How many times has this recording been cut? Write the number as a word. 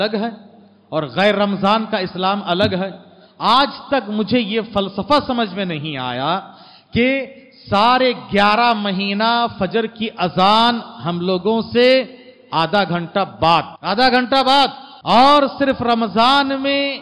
two